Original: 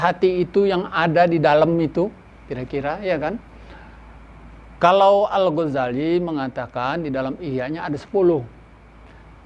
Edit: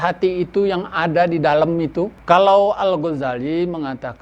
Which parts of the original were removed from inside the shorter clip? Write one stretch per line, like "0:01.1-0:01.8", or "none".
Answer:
0:02.2-0:04.7